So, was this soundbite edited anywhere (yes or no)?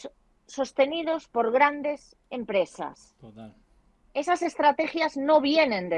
no